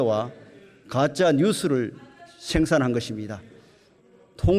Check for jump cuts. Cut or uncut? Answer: uncut